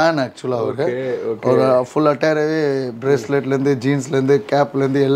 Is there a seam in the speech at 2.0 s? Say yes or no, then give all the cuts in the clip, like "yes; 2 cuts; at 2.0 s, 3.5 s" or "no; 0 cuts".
no; 0 cuts